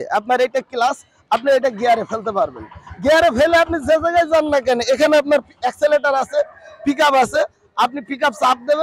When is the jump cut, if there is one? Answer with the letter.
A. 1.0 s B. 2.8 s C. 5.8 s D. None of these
D